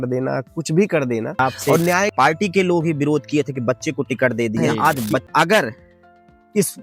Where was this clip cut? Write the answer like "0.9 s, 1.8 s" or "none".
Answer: 2.1 s, 5.3 s